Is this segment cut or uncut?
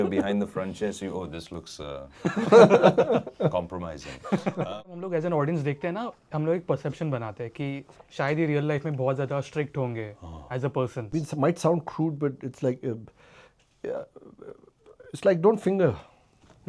cut